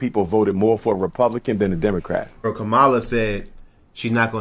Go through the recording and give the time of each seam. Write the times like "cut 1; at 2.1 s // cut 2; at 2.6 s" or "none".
cut 1; at 2.4 s